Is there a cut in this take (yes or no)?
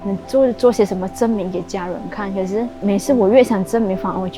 no